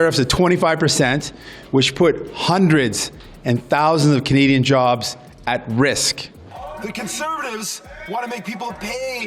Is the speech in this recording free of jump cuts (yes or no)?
no